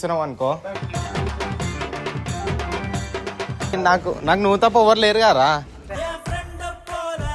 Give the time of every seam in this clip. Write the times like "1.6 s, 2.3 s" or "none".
3.8 s, 5.7 s